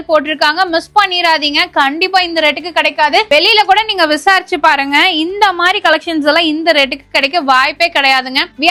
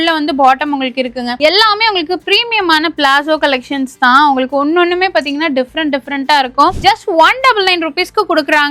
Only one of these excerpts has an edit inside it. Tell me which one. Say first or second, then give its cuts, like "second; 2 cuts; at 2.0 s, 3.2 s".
second; 2 cuts; at 1.3 s, 6.8 s